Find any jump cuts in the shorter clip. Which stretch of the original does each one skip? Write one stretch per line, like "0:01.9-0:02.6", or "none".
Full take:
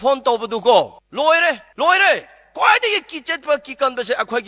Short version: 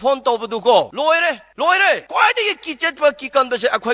0:00.9-0:01.1
0:02.2-0:02.5